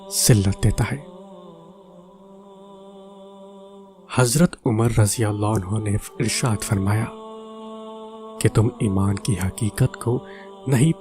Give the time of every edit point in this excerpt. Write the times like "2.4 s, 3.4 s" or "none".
1.0 s, 4.1 s